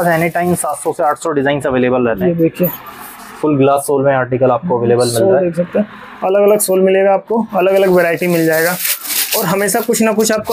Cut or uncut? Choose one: uncut